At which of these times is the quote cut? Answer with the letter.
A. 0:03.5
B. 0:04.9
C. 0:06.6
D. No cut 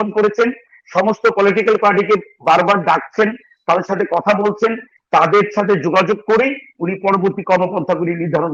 D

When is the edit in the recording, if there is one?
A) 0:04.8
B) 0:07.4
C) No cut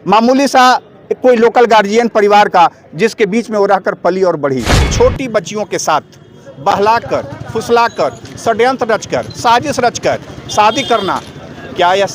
A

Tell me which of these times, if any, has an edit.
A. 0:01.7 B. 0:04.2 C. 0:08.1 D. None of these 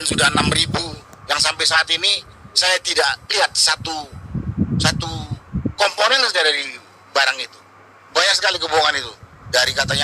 C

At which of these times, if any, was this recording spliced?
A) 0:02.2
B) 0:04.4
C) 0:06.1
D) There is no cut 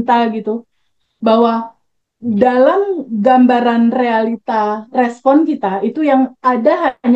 D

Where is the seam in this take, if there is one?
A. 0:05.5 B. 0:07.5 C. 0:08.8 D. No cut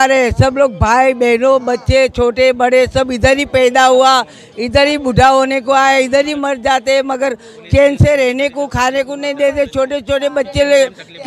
D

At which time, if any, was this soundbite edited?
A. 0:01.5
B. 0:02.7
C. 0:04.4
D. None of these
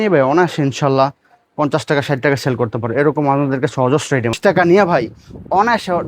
C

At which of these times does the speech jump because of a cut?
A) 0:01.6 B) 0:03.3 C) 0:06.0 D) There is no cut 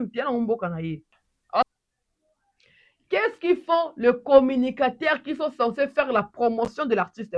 A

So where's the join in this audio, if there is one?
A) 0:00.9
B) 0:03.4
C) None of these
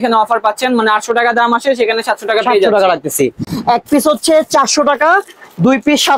C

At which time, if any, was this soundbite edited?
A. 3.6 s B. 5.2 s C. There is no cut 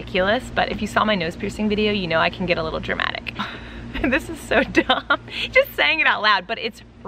A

